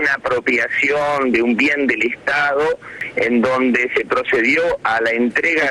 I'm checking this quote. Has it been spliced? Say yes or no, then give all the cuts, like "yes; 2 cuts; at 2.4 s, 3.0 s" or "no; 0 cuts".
yes; 1 cut; at 3.0 s